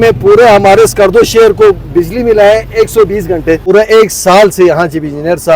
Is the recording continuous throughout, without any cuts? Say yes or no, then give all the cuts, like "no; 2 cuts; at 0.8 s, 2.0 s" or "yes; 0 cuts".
no; 1 cut; at 3.7 s